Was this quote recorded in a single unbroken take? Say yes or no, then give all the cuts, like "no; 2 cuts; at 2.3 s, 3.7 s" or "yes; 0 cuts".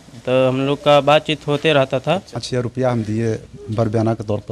no; 1 cut; at 2.3 s